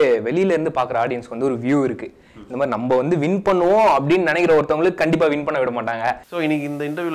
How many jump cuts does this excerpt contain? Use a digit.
1